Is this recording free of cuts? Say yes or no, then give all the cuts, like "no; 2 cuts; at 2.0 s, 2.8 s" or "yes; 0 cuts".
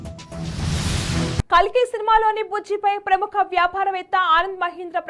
no; 1 cut; at 1.4 s